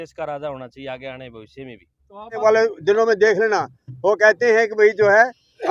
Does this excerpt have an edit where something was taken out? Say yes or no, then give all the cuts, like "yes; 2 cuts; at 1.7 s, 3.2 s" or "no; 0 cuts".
yes; 1 cut; at 2.4 s